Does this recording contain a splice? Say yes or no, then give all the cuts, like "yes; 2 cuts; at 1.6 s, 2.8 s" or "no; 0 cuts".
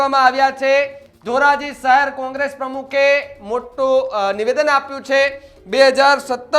yes; 1 cut; at 1.0 s